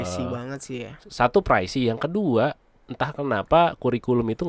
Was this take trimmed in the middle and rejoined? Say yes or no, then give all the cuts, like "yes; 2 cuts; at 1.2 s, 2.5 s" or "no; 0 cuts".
no; 0 cuts